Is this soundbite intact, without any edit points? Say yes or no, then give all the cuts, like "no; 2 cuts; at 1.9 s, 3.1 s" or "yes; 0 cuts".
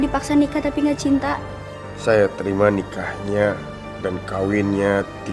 no; 1 cut; at 1.9 s